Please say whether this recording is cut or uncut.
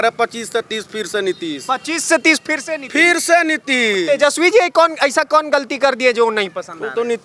uncut